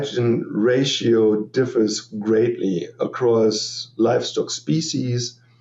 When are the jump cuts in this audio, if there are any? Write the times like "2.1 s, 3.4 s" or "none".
none